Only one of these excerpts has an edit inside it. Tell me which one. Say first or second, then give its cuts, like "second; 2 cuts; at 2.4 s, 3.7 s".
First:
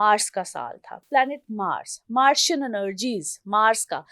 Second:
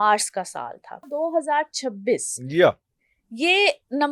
second; 1 cut; at 1.1 s